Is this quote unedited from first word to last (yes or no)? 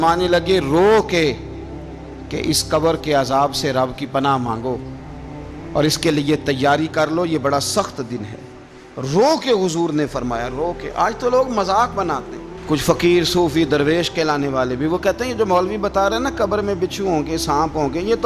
yes